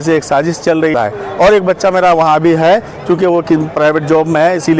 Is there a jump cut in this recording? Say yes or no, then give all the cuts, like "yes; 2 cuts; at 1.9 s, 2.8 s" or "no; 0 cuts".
yes; 1 cut; at 0.9 s